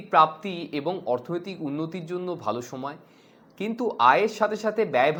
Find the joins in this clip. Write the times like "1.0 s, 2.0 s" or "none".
none